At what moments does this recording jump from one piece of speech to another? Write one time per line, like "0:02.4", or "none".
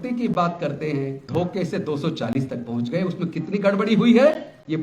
0:01.2